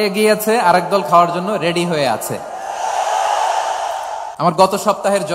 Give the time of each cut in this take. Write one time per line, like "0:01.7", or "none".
0:04.2